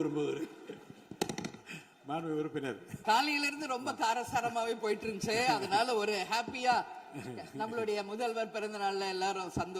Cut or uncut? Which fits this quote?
cut